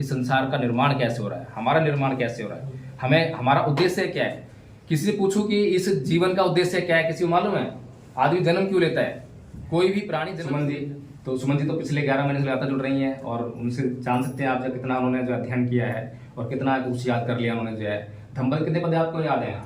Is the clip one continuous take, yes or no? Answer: no